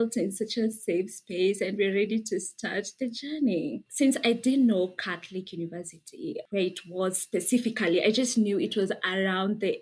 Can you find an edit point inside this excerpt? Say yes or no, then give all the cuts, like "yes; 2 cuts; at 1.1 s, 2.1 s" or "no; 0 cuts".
no; 0 cuts